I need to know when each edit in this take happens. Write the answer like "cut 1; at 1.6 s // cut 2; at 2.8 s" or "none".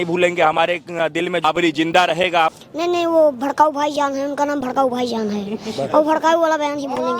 cut 1; at 1.4 s // cut 2; at 2.5 s